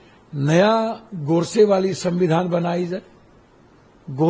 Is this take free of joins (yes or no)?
yes